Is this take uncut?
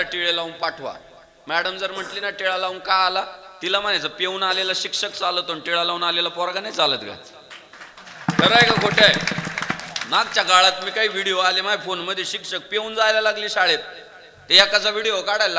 yes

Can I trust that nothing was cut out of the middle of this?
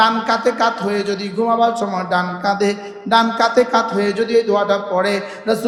yes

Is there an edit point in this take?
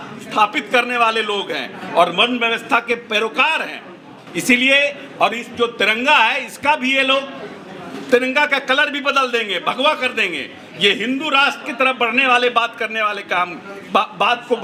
no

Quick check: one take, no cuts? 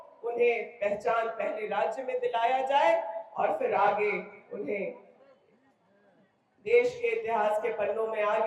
yes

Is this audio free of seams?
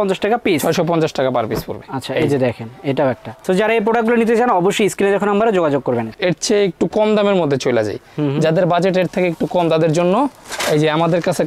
yes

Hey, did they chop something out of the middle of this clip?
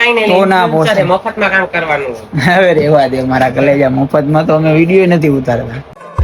no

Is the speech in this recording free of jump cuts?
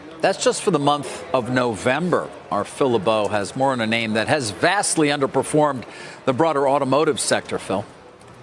yes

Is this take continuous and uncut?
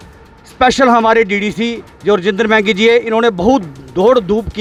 yes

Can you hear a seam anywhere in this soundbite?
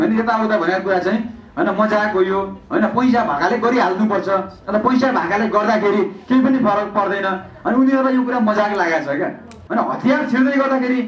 yes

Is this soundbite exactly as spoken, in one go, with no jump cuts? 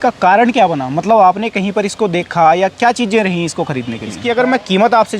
no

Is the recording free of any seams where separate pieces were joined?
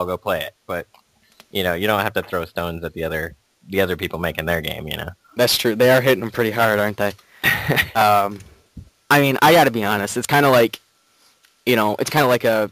no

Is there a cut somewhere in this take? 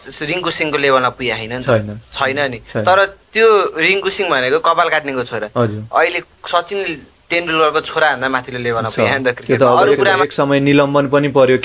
yes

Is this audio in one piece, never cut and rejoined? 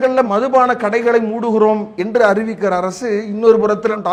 yes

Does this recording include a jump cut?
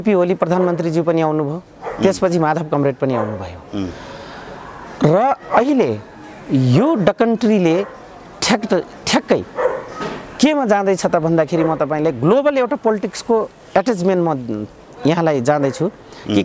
no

